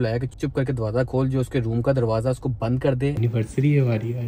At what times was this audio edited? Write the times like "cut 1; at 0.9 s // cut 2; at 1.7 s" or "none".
cut 1; at 3.2 s